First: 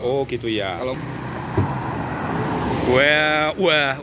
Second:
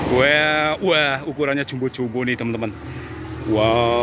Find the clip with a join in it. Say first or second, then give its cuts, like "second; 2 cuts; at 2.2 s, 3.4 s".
first; 1 cut; at 0.9 s